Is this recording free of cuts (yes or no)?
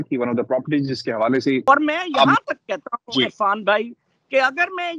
no